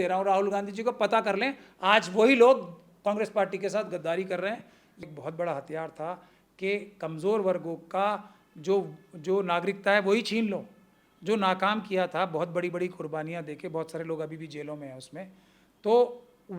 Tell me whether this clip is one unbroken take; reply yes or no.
no